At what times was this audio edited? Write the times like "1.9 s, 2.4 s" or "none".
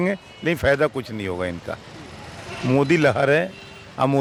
none